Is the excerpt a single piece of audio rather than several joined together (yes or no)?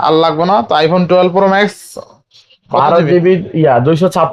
yes